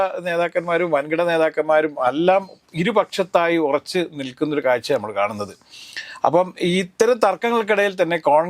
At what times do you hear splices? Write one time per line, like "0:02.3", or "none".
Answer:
none